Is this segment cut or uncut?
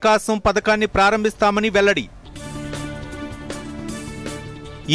uncut